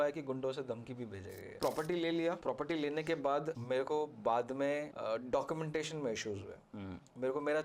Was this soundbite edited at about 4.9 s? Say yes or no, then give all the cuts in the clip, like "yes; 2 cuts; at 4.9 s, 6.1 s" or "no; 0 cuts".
yes; 4 cuts; at 1.6 s, 2.4 s, 3.6 s, 4.9 s